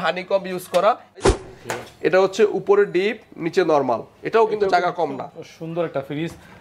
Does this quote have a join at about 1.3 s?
yes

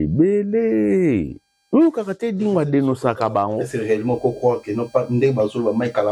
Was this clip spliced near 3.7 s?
yes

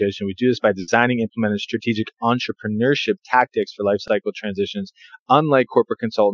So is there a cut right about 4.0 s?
yes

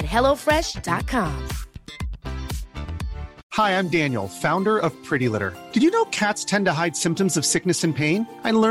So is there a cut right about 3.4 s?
yes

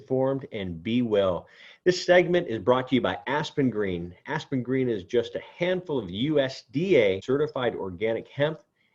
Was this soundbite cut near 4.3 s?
no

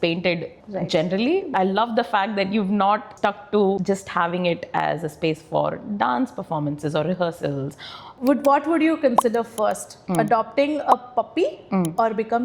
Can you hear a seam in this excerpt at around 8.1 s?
yes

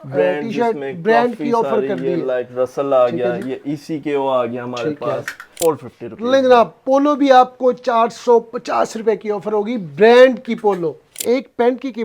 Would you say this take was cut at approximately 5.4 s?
yes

